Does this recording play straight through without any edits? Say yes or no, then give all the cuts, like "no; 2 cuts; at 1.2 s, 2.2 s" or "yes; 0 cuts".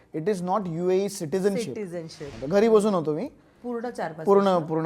no; 1 cut; at 2.3 s